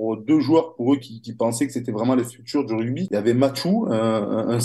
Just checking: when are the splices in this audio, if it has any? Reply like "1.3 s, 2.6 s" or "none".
none